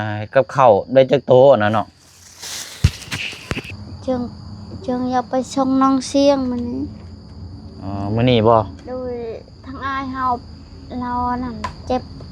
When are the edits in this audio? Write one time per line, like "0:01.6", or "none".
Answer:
0:03.7